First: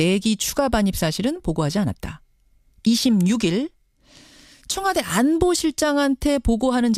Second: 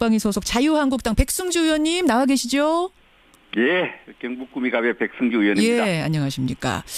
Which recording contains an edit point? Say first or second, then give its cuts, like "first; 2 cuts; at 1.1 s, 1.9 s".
second; 1 cut; at 1.7 s